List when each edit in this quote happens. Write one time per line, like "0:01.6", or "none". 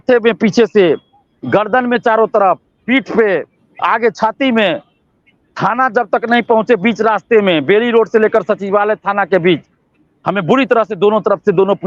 none